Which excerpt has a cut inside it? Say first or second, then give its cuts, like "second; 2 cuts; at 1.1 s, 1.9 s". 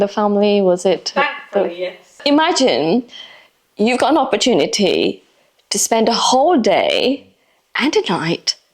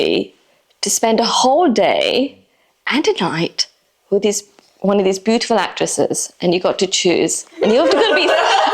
first; 1 cut; at 2.2 s